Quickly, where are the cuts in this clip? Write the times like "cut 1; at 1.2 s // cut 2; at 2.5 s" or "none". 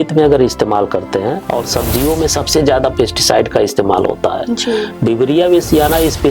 cut 1; at 1.4 s // cut 2; at 4.9 s